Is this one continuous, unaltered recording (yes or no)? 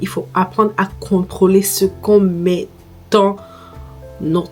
yes